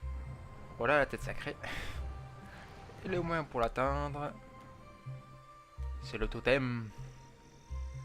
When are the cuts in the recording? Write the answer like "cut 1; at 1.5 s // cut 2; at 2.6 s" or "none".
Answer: cut 1; at 6.4 s

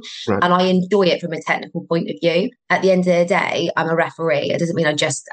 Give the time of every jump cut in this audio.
cut 1; at 2.6 s

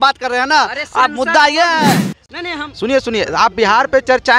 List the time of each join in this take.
cut 1; at 2.1 s

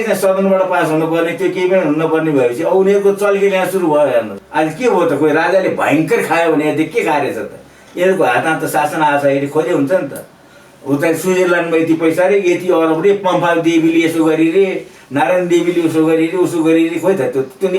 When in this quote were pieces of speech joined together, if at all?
cut 1; at 4.4 s

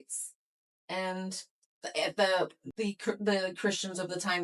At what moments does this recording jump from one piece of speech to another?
cut 1; at 2.6 s

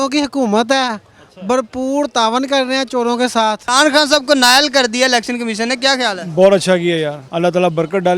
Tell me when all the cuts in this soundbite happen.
cut 1; at 3.6 s // cut 2; at 7.2 s

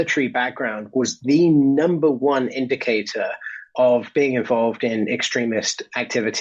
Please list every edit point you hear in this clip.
none

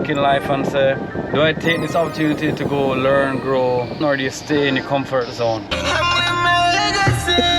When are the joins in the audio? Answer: cut 1; at 3.9 s // cut 2; at 5.7 s

